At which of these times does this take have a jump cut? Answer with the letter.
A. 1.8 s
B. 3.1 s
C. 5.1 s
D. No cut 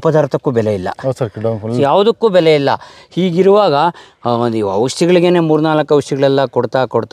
A